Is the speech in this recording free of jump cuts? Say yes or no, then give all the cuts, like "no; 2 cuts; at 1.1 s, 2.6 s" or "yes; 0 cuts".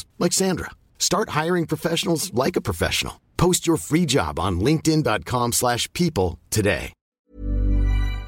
no; 1 cut; at 7.3 s